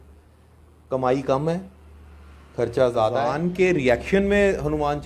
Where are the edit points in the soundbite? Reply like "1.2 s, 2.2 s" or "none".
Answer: 3.3 s